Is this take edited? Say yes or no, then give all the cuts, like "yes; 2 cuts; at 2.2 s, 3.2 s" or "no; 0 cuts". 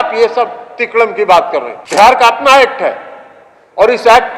yes; 1 cut; at 1.8 s